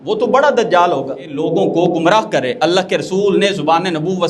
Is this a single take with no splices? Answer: no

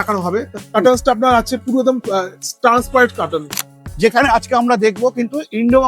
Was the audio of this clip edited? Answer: yes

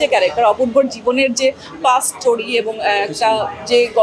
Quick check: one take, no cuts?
yes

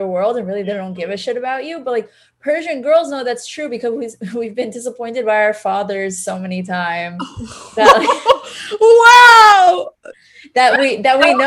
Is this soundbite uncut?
yes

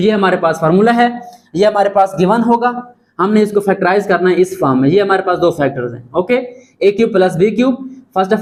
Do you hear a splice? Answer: no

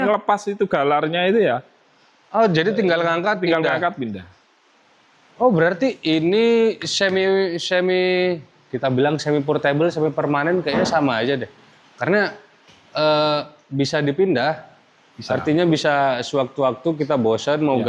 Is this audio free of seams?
yes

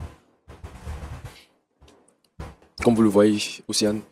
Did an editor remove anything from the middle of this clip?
yes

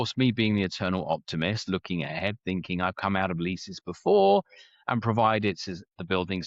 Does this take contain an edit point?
no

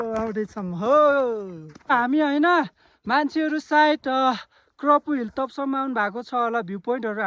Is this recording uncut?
no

